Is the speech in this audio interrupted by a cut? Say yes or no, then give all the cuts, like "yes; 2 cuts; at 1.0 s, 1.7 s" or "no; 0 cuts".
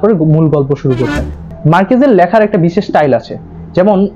yes; 1 cut; at 1.3 s